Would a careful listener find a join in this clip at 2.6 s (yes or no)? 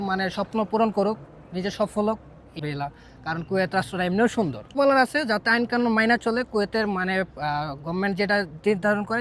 yes